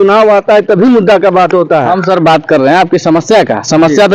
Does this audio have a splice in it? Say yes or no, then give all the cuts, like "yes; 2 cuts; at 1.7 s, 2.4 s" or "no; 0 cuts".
no; 0 cuts